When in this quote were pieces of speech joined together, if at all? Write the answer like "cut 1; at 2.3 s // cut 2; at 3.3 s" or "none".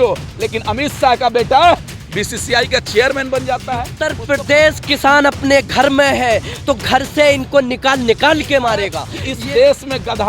cut 1; at 3.9 s // cut 2; at 9.0 s